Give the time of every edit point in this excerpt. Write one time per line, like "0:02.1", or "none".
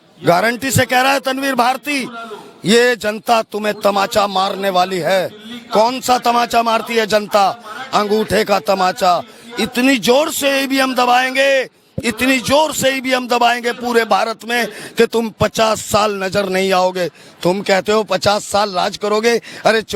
none